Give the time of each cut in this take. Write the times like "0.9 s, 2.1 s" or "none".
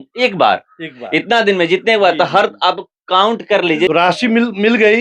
3.9 s